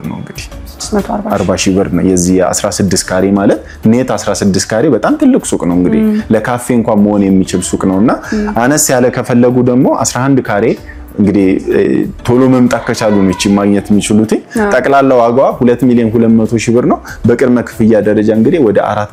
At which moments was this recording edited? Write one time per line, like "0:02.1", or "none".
none